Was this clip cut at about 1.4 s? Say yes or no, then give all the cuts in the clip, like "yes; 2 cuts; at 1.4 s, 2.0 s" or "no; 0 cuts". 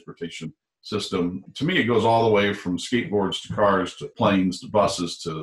yes; 2 cuts; at 1.4 s, 4.0 s